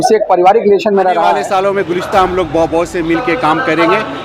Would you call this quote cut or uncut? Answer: cut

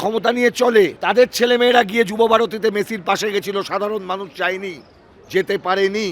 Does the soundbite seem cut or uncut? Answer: cut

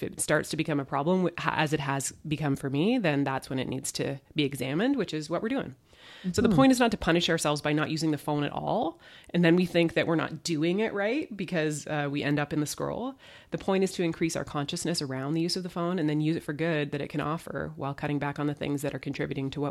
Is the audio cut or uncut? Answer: uncut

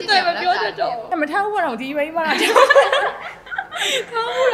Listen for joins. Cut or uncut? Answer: cut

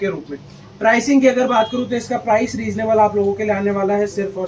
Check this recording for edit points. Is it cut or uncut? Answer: uncut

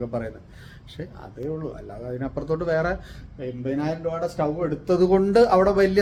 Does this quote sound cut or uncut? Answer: uncut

